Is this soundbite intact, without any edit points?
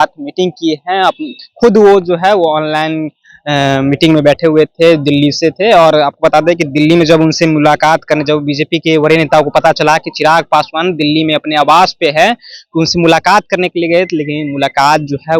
yes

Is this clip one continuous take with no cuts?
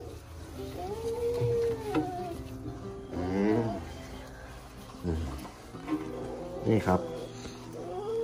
yes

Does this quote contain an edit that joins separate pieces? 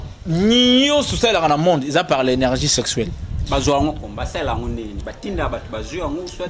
no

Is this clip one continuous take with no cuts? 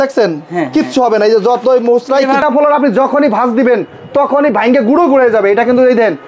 no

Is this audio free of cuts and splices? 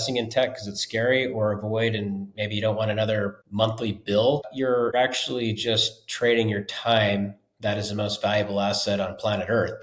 no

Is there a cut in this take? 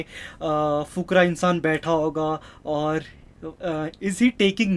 no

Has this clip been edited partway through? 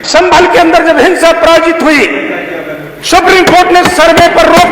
no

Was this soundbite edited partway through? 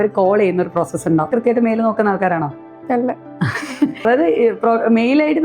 yes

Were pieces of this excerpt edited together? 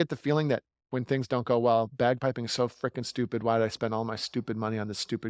yes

